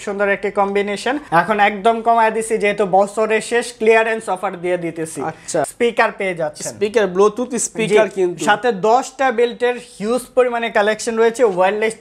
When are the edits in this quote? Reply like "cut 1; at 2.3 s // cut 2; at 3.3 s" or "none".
cut 1; at 1.3 s // cut 2; at 5.6 s